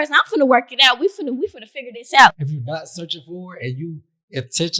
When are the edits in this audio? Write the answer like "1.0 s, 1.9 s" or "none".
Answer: 2.4 s